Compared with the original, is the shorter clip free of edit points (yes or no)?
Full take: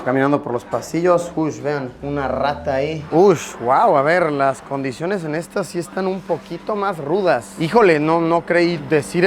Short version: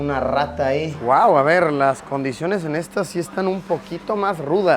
no